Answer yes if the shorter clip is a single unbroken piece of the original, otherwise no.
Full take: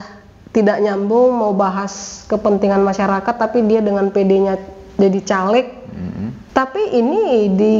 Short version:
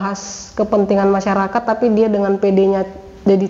yes